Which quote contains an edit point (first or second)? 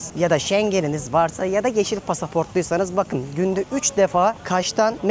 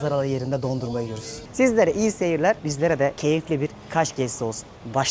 second